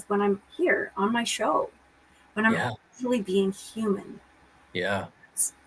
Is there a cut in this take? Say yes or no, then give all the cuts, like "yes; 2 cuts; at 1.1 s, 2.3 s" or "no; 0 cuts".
no; 0 cuts